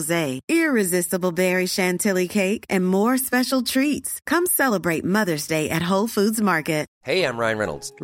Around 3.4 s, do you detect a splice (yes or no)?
no